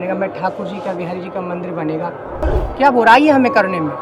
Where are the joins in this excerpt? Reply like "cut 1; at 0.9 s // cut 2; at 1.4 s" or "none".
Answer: cut 1; at 2.4 s